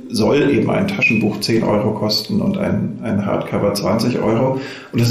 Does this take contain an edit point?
no; 0 cuts

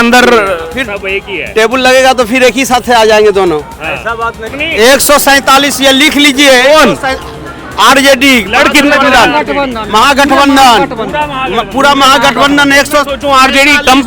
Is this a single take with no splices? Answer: no; 1 cut; at 4.5 s

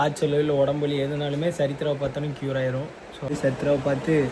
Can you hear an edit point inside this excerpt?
yes; 1 cut; at 3.3 s

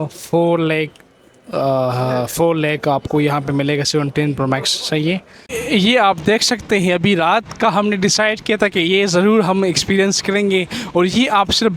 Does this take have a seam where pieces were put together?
yes; 1 cut; at 5.5 s

